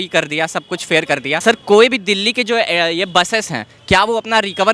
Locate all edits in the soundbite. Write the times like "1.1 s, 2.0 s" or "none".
1.4 s